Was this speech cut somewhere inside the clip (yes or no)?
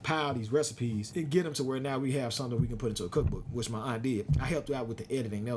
yes